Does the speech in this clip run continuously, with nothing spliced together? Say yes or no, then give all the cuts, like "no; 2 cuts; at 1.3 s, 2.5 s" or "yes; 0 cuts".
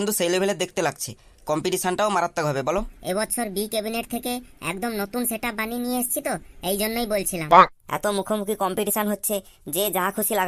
no; 2 cuts; at 2.9 s, 7.8 s